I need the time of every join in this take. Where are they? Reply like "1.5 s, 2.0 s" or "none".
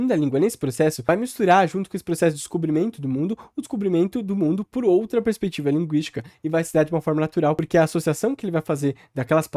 none